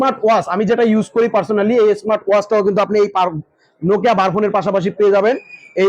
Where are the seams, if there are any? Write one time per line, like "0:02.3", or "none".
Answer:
none